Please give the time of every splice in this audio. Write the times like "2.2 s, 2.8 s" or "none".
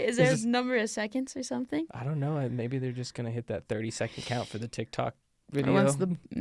none

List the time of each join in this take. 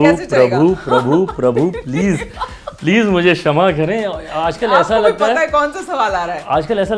none

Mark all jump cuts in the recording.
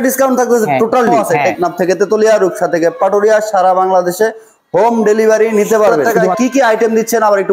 1.2 s, 6.1 s

